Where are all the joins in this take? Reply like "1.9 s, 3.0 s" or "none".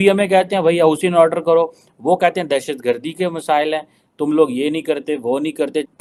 none